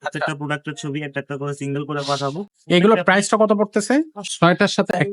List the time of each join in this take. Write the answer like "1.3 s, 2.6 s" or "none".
2.5 s, 4.2 s